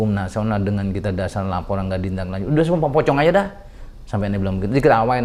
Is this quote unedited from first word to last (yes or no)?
yes